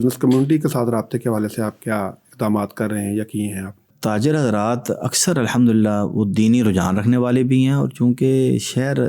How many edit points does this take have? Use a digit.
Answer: 1